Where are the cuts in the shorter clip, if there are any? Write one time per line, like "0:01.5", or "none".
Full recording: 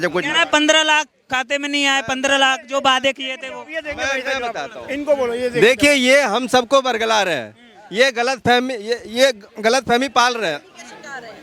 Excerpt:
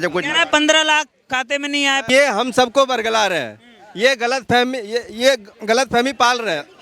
0:02.1